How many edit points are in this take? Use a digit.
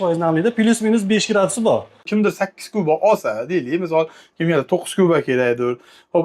1